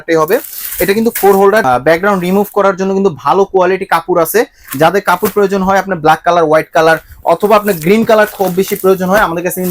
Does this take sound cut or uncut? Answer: cut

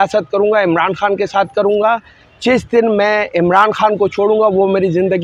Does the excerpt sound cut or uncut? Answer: uncut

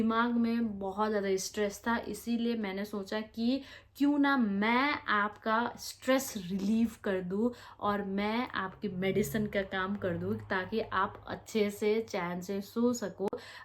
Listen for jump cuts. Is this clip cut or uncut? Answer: uncut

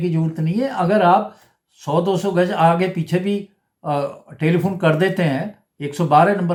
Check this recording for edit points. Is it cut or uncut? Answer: uncut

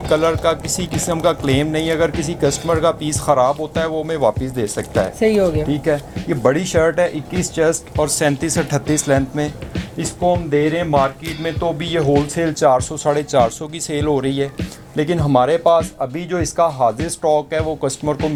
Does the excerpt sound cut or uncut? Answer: uncut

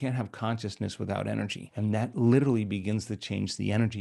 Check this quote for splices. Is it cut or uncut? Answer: cut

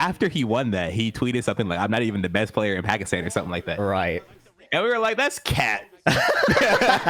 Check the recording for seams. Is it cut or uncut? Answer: uncut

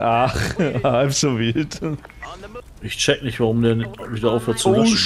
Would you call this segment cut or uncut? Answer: cut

